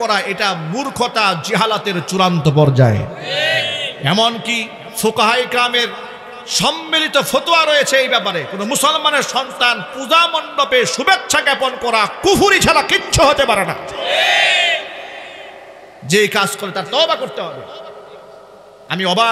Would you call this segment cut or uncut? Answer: uncut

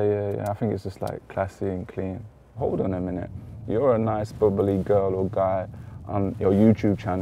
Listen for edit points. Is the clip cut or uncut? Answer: cut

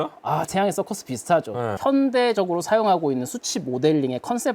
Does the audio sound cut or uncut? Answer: cut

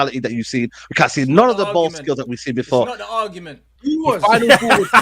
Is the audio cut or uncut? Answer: cut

